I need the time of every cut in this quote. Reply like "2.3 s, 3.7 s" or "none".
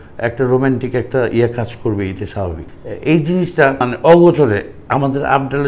2.7 s, 3.8 s

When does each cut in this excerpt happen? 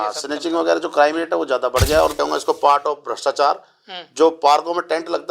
2.2 s

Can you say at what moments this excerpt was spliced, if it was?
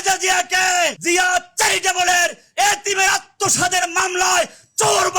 1.0 s

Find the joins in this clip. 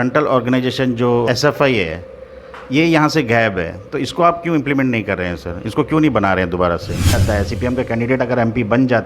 1.3 s, 7.1 s

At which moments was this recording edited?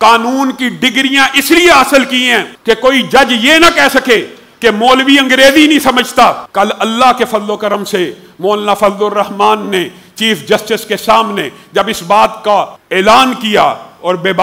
2.5 s, 6.4 s, 12.8 s

